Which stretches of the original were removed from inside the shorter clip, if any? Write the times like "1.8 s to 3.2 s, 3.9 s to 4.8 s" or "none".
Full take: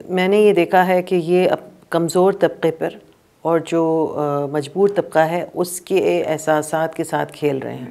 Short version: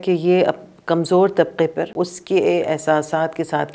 2.9 s to 5.5 s